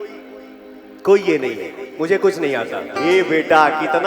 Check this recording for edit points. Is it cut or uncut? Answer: cut